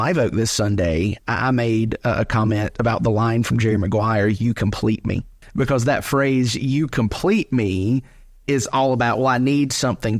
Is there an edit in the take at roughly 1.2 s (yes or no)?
no